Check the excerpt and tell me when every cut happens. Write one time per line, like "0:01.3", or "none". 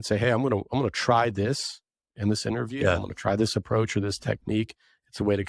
none